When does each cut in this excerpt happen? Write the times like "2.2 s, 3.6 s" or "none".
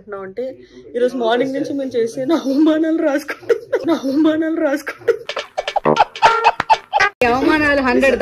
3.8 s, 5.2 s, 7.2 s